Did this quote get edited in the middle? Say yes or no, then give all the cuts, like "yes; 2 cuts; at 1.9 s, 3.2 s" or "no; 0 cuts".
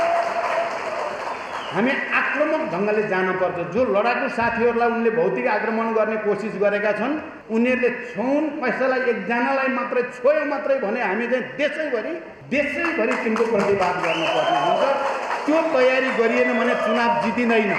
yes; 2 cuts; at 7.3 s, 12.3 s